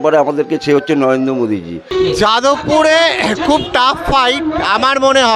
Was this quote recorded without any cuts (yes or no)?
no